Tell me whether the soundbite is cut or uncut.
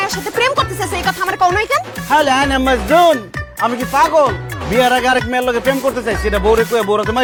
uncut